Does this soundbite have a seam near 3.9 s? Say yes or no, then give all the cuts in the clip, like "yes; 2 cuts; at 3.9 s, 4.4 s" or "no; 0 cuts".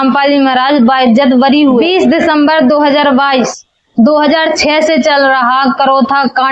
no; 1 cut; at 1.8 s